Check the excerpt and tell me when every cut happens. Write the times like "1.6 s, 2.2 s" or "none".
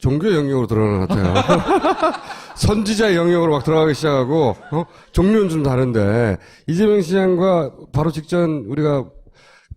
8.1 s